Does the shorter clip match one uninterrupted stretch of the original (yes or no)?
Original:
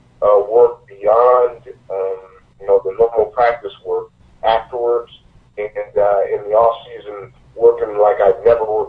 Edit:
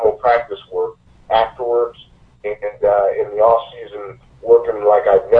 yes